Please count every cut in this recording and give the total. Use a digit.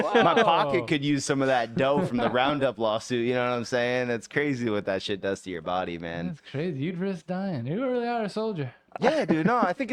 0